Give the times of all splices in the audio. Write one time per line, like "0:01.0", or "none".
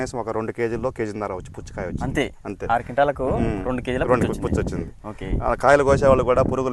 none